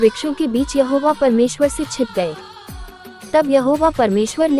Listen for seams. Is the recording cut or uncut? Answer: uncut